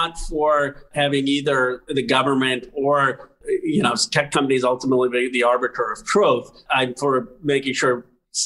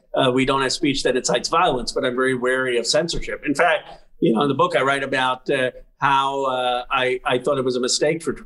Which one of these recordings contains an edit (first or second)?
first